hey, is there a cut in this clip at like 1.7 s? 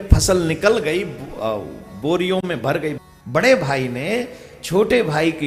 no; 1 cut; at 3.0 s

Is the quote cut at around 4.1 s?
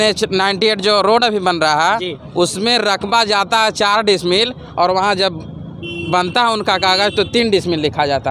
no; 0 cuts

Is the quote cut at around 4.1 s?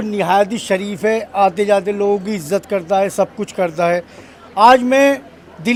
no; 0 cuts

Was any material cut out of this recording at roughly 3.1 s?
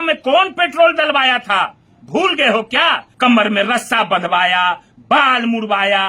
yes; 1 cut; at 3.1 s

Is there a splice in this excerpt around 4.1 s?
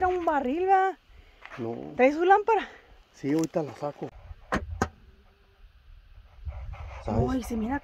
yes; 1 cut; at 4.1 s

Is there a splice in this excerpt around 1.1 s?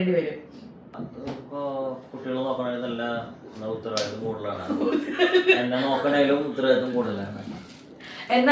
yes; 1 cut; at 1.1 s

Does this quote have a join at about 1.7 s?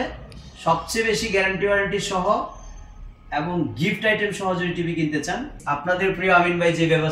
no; 1 cut; at 5.5 s

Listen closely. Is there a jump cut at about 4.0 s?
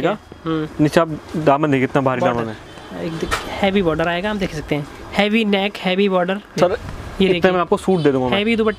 no; 1 cut; at 6.5 s

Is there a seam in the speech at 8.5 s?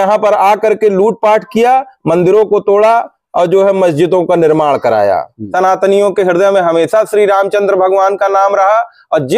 no; 1 cut; at 5.4 s

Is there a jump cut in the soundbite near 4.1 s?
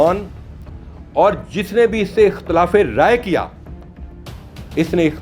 no; 0 cuts

